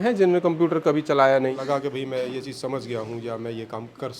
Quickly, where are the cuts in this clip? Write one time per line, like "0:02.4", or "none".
0:01.6

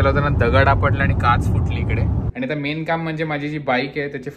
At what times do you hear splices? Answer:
0:02.3

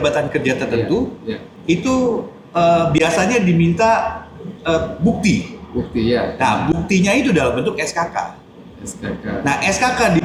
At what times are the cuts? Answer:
none

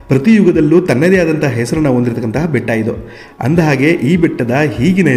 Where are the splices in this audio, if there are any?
none

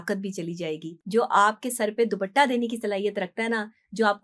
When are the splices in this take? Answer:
0:00.9

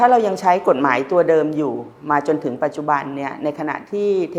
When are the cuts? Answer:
none

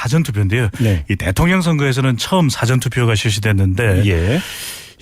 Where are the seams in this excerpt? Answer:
0:02.2

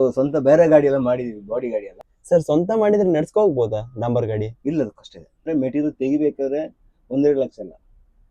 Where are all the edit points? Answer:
0:02.0
0:05.5

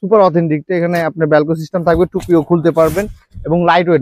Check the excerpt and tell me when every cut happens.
none

